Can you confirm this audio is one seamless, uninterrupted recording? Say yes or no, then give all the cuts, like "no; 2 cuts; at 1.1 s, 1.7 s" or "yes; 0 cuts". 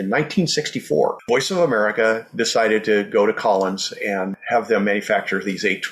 no; 1 cut; at 1.2 s